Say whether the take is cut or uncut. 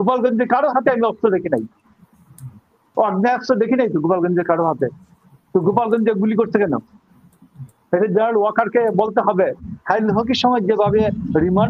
cut